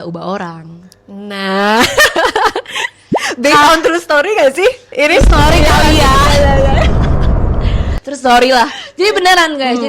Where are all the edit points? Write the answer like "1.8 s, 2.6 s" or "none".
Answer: none